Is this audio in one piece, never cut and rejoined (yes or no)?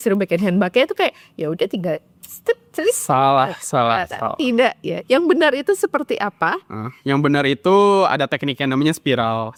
yes